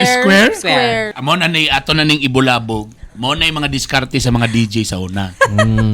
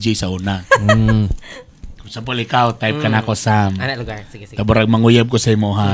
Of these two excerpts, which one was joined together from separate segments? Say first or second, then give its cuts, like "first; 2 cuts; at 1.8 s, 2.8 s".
first; 1 cut; at 1.1 s